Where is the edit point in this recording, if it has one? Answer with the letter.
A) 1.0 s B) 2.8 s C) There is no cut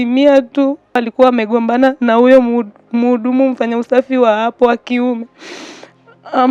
A